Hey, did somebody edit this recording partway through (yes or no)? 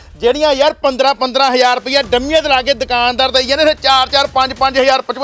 no